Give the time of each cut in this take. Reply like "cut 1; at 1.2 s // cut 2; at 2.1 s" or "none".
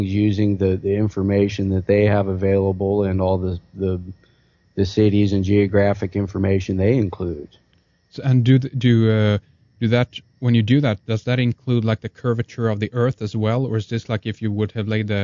cut 1; at 4.7 s